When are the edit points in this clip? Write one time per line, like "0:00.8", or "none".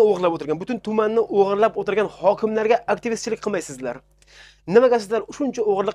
none